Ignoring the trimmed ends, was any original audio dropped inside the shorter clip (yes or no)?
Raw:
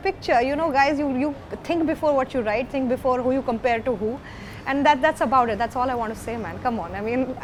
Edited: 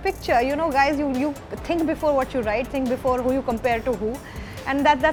no